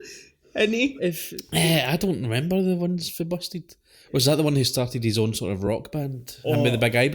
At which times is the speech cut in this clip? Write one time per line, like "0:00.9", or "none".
0:00.9